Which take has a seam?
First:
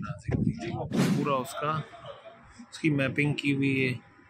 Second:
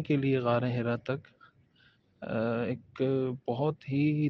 first; 1 cut; at 1.0 s

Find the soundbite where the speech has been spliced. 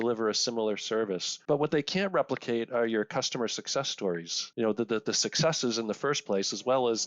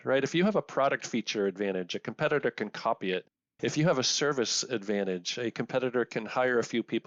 first; 2 cuts; at 1.3 s, 4.4 s

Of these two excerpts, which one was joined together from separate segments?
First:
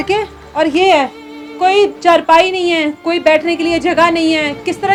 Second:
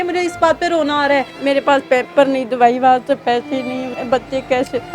second; 2 cuts; at 1.3 s, 3.9 s

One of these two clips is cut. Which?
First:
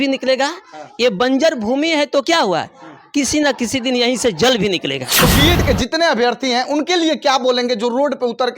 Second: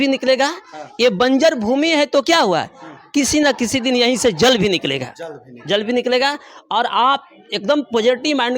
first; 1 cut; at 5.1 s

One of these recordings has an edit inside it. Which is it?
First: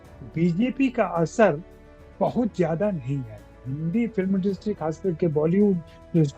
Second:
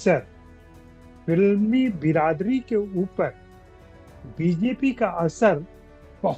first; 1 cut; at 3.7 s

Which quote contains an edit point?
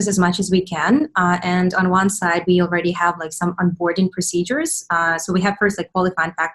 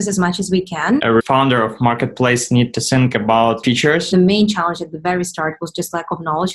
second; 2 cuts; at 1.0 s, 4.1 s

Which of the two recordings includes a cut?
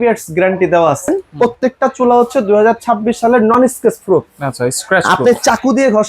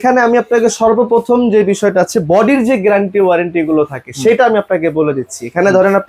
first; 1 cut; at 1.3 s

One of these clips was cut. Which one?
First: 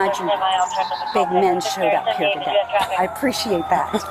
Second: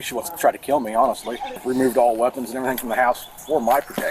second; 1 cut; at 1.6 s

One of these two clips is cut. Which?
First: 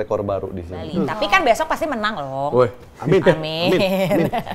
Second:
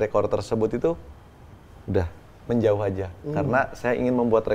first; 1 cut; at 1.0 s

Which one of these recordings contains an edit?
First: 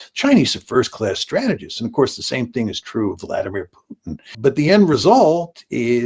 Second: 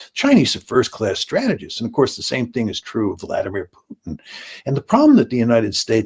first; 1 cut; at 4.3 s

